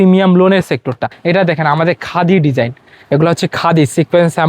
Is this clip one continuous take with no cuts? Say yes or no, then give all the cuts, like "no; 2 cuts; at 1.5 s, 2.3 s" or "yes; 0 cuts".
no; 1 cut; at 1.1 s